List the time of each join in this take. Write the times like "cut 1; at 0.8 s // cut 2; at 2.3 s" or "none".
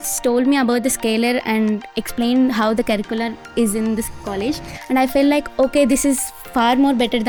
none